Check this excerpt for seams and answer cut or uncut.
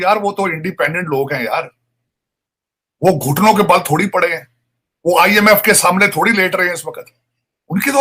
uncut